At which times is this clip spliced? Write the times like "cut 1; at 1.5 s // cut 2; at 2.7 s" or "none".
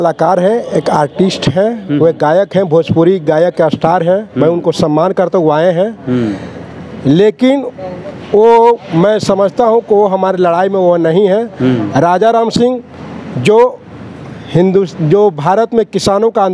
none